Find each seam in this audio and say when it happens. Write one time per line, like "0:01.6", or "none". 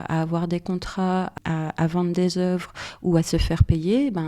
0:01.3